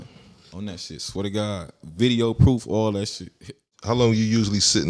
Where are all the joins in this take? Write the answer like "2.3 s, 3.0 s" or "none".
3.7 s